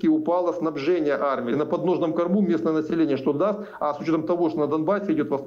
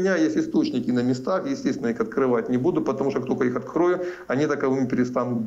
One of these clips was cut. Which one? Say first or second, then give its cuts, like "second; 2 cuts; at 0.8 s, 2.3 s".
first; 1 cut; at 1.5 s